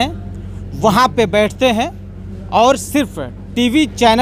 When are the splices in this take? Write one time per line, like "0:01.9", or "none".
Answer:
none